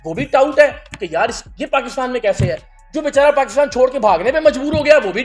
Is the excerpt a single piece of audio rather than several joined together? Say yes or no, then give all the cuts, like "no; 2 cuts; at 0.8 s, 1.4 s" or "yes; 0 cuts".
yes; 0 cuts